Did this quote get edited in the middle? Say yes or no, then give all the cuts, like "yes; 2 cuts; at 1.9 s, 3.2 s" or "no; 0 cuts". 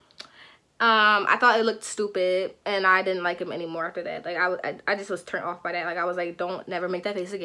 no; 0 cuts